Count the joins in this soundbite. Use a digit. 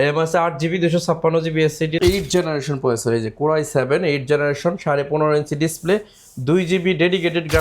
1